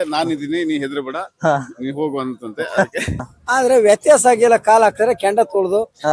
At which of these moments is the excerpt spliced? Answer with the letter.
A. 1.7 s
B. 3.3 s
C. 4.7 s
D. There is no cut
B